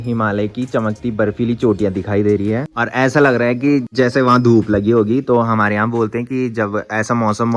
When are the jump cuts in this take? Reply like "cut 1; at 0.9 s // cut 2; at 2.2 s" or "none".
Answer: none